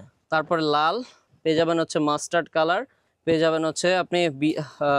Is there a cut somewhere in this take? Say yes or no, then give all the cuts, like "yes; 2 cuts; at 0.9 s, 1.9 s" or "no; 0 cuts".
no; 0 cuts